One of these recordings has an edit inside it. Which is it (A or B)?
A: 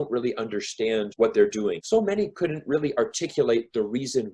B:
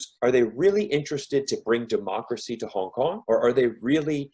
A